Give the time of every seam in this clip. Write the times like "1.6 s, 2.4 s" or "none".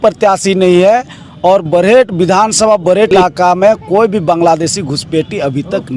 3.1 s